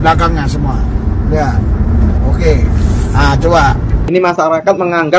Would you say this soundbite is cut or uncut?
cut